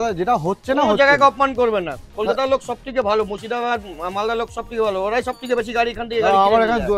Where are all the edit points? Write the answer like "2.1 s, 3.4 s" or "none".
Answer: none